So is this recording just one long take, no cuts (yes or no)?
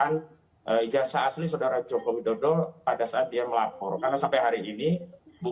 yes